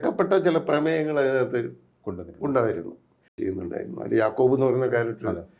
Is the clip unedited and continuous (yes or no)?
no